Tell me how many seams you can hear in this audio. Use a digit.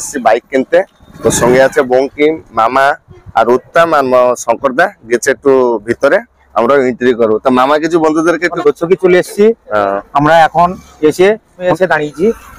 2